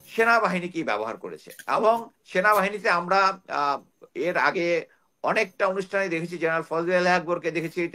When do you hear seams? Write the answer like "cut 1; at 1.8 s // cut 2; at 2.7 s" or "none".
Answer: none